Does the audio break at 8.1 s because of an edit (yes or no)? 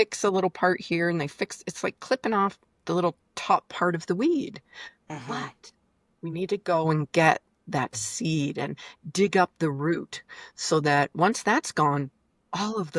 no